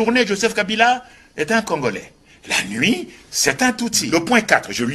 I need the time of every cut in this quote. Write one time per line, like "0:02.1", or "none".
0:04.0